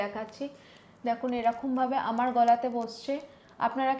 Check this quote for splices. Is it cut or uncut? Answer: uncut